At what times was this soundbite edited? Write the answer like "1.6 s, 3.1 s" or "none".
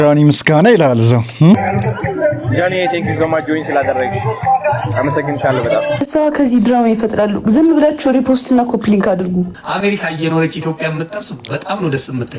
1.6 s, 6.0 s, 9.6 s